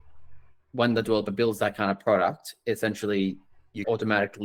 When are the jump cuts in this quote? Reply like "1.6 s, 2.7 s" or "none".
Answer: none